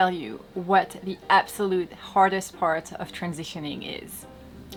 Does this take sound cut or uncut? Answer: uncut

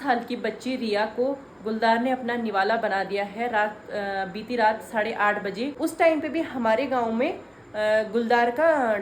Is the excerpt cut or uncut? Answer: cut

